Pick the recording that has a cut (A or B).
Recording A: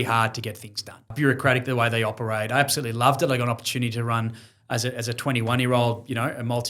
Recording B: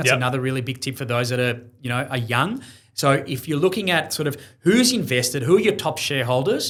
A